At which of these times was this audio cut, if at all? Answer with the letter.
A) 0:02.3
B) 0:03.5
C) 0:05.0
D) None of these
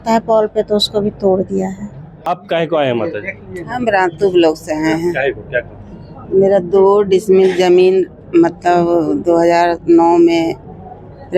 A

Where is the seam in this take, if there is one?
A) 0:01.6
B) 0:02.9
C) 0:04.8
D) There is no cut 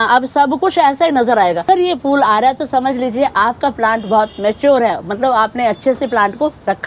A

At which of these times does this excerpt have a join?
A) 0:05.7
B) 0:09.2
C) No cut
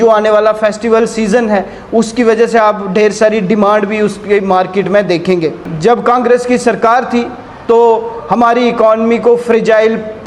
A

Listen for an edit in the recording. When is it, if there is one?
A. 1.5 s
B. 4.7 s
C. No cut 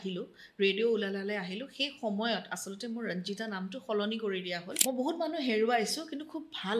B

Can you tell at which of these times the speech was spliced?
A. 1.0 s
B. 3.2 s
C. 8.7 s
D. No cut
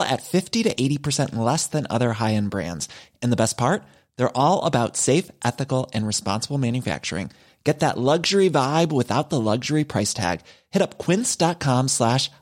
D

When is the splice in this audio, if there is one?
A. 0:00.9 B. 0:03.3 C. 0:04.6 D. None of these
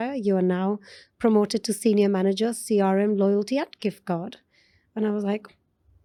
D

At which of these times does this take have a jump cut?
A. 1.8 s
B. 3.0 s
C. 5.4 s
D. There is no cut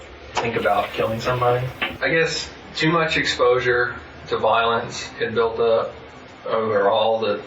A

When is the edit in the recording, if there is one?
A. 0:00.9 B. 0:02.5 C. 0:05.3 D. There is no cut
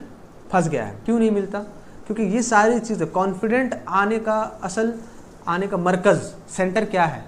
A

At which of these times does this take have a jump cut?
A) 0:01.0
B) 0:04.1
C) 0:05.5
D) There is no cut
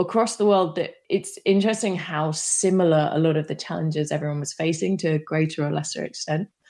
A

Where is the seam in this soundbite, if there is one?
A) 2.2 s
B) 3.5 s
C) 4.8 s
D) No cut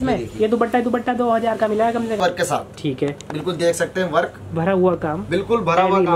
A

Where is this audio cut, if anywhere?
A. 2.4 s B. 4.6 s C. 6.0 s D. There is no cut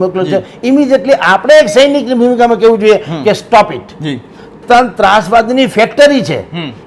B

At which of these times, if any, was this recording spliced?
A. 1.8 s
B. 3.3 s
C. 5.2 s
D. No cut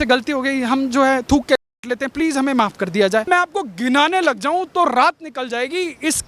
B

